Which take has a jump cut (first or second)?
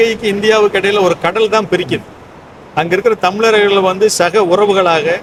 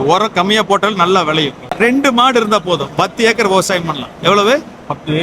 second